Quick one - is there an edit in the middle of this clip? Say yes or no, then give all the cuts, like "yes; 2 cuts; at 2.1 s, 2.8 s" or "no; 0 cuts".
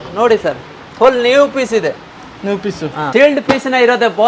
yes; 1 cut; at 3.0 s